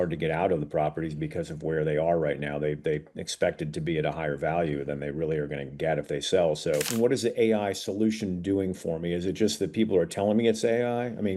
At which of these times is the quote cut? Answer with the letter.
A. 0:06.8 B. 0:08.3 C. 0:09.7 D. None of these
A